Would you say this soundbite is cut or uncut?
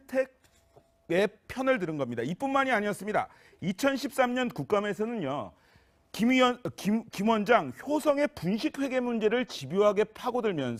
uncut